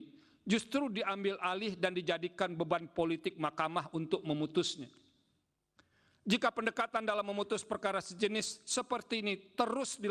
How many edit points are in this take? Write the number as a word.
zero